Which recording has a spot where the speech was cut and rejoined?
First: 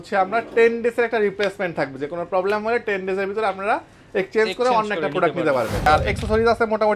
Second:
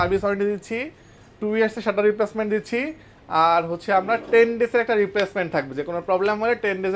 first; 1 cut; at 5.9 s

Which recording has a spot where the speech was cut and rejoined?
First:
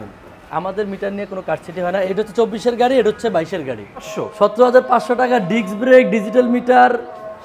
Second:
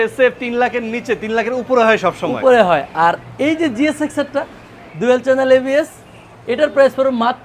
first; 2 cuts; at 2.1 s, 4.1 s

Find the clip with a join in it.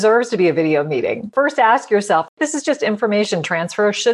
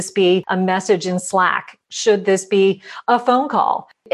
first; 2 cuts; at 1.3 s, 2.4 s

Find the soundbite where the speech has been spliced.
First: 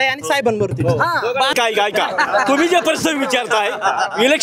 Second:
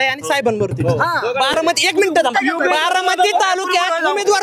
first; 1 cut; at 1.5 s

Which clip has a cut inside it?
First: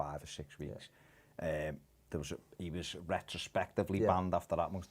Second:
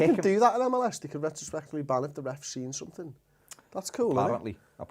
first; 1 cut; at 3.4 s

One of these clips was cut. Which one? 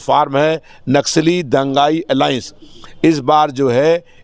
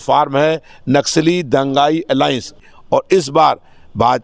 second; 1 cut; at 2.7 s

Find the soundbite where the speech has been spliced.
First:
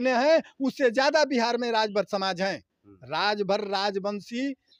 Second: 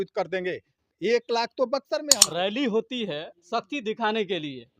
second; 1 cut; at 2.2 s

